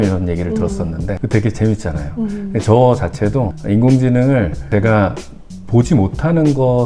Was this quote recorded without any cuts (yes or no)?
no